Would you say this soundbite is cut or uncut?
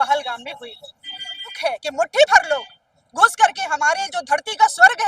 cut